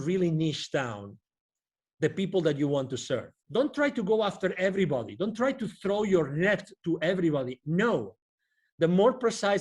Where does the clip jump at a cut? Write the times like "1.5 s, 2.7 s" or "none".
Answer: 3.4 s